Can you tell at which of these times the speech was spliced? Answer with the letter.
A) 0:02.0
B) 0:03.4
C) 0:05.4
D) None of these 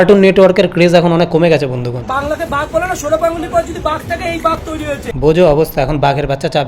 A